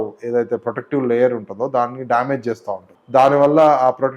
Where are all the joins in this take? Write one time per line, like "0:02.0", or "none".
0:02.9